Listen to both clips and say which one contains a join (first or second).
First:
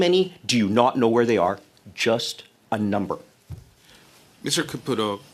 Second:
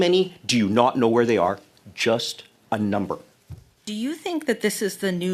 second